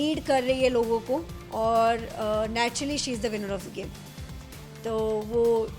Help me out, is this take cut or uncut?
uncut